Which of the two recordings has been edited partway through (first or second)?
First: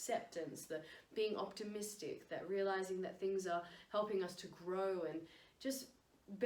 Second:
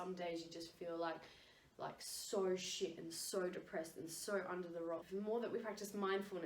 second